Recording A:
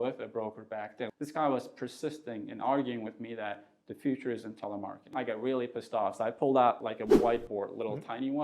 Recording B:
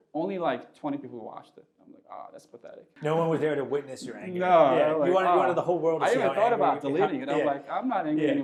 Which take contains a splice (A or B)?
A